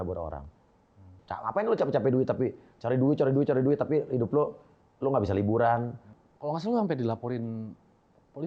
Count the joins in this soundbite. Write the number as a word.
two